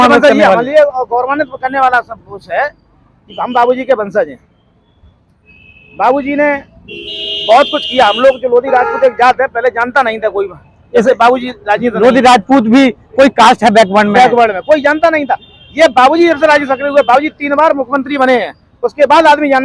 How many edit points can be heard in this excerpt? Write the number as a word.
zero